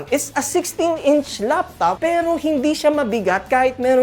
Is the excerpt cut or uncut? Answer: uncut